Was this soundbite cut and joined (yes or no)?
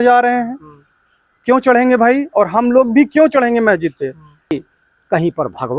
yes